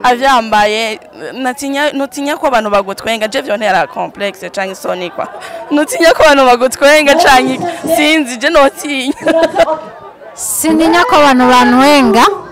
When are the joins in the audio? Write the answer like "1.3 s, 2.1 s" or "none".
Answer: 9.7 s